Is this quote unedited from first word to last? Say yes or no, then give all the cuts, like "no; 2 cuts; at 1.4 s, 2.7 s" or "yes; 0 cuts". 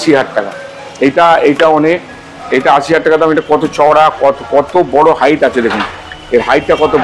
yes; 0 cuts